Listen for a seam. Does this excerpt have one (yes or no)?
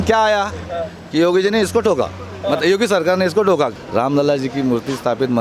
yes